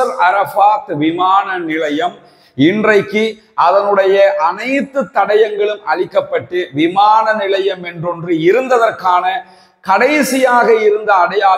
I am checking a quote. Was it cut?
no; 0 cuts

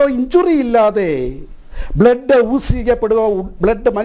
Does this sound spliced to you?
no; 0 cuts

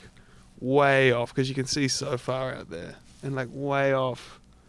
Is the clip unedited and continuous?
yes; 0 cuts

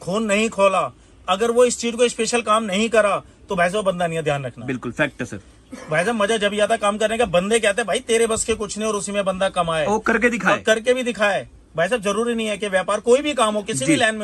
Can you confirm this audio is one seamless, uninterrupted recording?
yes; 0 cuts

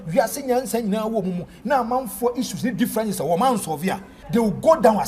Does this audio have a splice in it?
yes; 1 cut; at 4.1 s

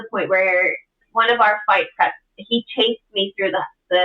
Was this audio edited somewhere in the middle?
yes; 1 cut; at 1.0 s

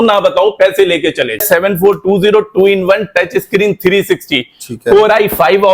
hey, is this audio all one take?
no; 1 cut; at 1.4 s

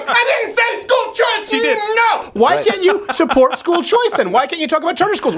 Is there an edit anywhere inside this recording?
yes; 1 cut; at 2.3 s

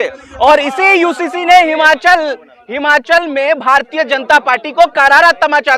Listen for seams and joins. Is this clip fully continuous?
yes; 0 cuts

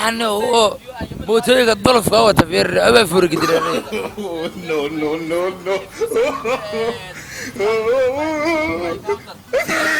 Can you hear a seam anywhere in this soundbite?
yes; 2 cuts; at 3.5 s, 6.1 s

